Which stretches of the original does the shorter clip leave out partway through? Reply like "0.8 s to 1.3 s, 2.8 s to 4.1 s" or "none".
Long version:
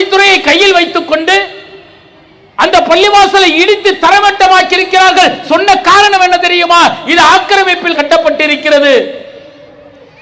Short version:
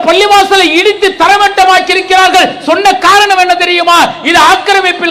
none